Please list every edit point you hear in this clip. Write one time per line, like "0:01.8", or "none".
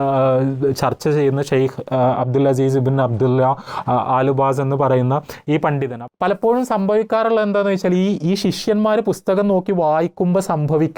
0:05.9